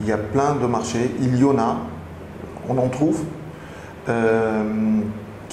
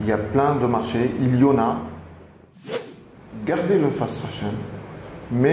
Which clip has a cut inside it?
second; 1 cut; at 2.7 s

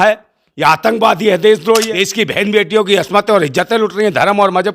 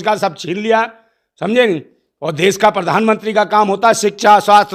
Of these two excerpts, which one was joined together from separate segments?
first; 1 cut; at 1.9 s

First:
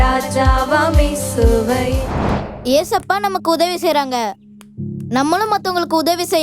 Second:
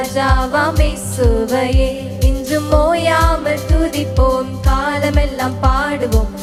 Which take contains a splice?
first; 1 cut; at 2.1 s

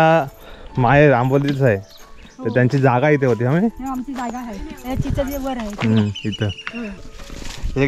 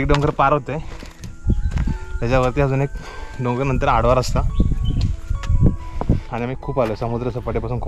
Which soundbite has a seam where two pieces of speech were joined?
first; 1 cut; at 7.0 s

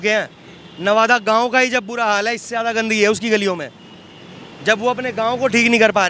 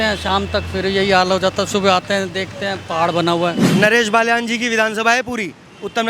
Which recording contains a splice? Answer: second; 1 cut; at 3.7 s

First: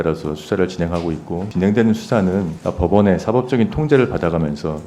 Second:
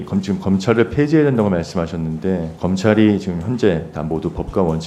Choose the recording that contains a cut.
first; 2 cuts; at 1.5 s, 2.6 s

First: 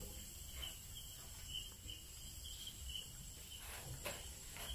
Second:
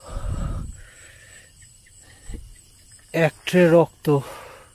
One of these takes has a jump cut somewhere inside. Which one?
first; 2 cuts; at 1.9 s, 3.5 s

